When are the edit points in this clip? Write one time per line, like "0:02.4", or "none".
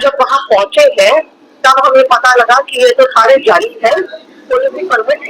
none